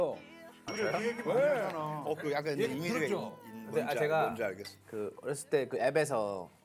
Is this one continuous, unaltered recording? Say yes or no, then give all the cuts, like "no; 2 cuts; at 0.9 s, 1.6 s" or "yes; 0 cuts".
yes; 0 cuts